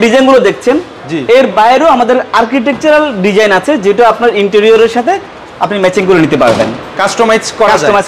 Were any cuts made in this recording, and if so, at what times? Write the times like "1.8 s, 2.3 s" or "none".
none